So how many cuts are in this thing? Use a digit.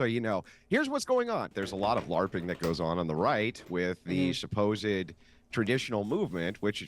1